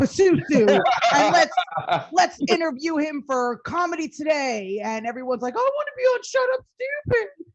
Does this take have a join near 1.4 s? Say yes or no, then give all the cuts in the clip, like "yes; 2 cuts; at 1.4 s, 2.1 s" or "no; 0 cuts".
no; 0 cuts